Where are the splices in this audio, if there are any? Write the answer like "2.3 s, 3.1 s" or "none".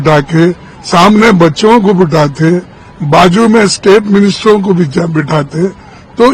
none